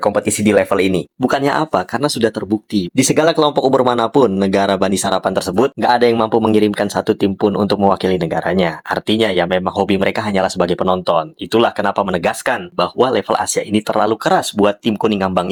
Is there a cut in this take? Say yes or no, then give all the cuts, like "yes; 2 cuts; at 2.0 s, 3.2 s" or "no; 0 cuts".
no; 0 cuts